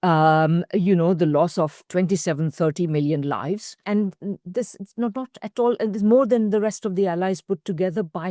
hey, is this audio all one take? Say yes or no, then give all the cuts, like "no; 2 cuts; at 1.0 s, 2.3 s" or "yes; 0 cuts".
no; 2 cuts; at 1.8 s, 3.8 s